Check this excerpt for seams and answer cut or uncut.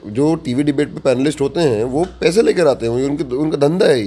uncut